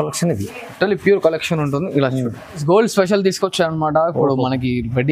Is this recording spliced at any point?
yes; 1 cut; at 2.6 s

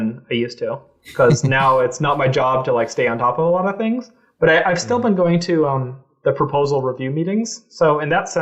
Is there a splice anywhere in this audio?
no; 0 cuts

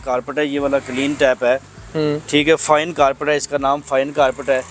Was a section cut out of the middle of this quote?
no; 0 cuts

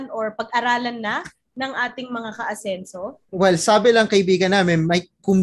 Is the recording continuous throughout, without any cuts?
no; 1 cut; at 3.3 s

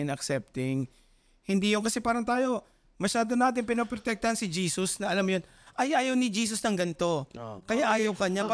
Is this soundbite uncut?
yes; 0 cuts

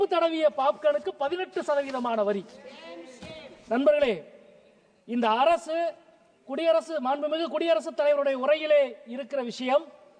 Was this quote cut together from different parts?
no; 0 cuts

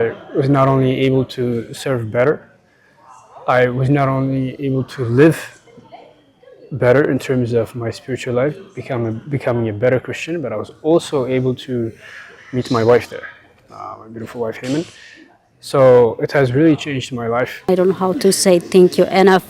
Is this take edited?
yes; 1 cut; at 17.7 s

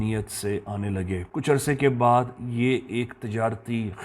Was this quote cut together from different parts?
yes; 1 cut; at 1.3 s

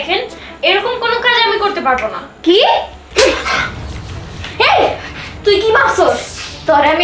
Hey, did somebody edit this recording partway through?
no; 0 cuts

